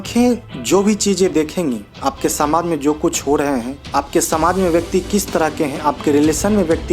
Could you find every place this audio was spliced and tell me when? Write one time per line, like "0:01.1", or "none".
0:03.8

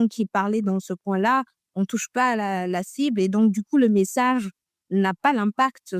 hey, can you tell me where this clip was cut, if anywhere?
none

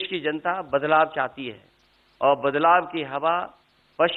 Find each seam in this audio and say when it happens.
none

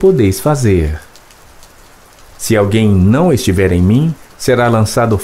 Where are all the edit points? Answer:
none

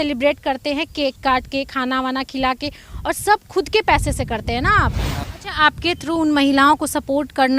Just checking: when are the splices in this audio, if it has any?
0:05.3

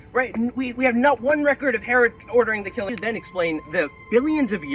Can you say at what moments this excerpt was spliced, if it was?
0:02.9

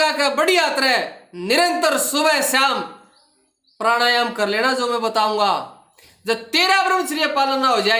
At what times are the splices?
none

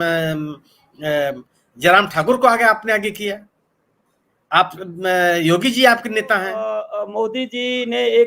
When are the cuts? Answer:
0:06.7

